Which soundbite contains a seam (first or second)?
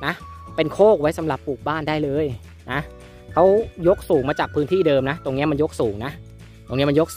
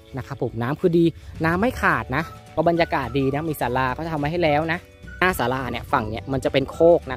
second